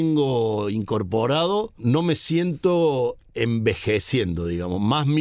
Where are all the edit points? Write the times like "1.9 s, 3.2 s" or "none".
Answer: 1.7 s